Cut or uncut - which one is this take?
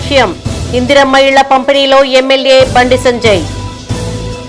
uncut